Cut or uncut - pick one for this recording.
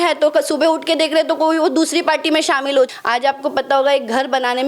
cut